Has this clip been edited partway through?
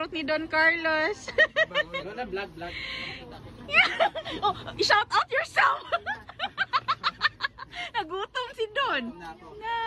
no; 0 cuts

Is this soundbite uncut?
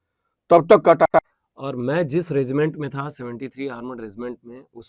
no; 1 cut; at 1.1 s

